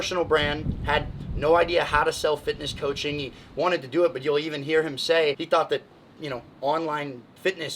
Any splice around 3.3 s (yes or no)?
no